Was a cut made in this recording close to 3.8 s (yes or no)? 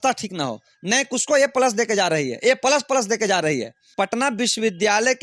yes